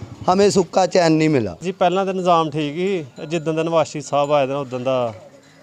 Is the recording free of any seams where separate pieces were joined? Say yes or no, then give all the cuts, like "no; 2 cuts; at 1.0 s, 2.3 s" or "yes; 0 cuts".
no; 1 cut; at 1.6 s